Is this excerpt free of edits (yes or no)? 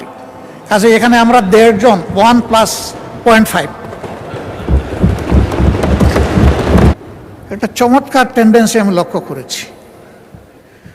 no